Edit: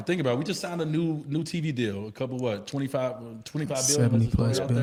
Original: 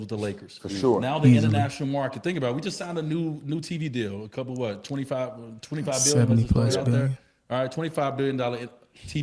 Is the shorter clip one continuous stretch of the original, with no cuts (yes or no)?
yes